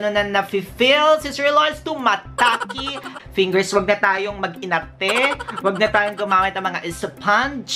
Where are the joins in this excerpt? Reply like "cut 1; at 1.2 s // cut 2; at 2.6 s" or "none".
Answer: cut 1; at 3.1 s